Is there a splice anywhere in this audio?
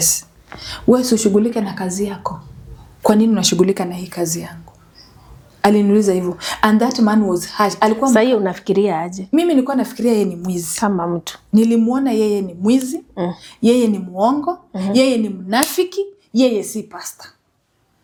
no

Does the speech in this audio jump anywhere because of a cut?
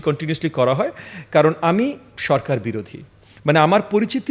no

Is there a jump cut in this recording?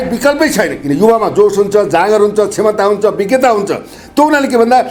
no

